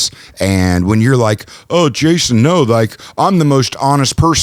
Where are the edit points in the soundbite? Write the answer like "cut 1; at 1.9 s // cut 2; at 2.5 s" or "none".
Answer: none